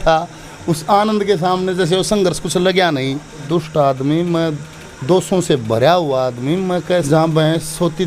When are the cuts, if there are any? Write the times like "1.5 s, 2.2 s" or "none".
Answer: 3.4 s, 7.0 s

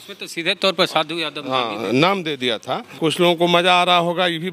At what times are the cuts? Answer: 2.9 s

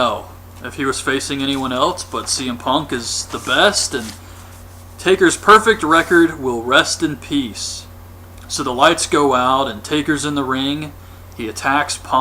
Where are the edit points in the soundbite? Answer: 1.1 s

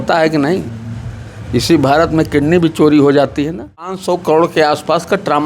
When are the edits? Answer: 4.0 s

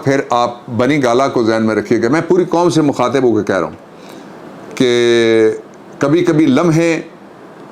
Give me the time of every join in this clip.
none

